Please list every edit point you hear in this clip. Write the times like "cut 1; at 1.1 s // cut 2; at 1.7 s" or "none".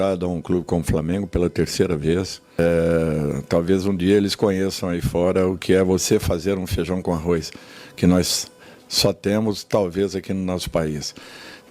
cut 1; at 2.4 s